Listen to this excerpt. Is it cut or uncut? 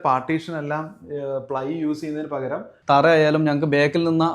cut